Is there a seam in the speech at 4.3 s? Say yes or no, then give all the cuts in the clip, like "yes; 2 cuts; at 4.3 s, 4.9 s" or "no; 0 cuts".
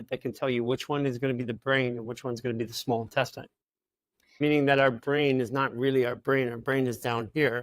yes; 1 cut; at 4.3 s